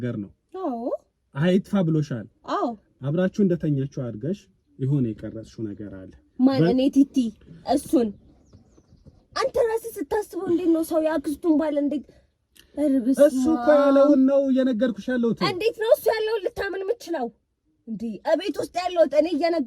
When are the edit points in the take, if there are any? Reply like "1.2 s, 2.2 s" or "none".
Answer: 2.9 s